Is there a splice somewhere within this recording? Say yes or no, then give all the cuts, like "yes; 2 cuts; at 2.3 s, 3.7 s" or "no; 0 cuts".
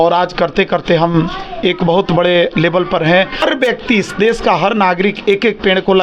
yes; 1 cut; at 3.4 s